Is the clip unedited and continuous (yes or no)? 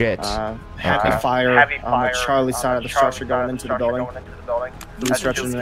yes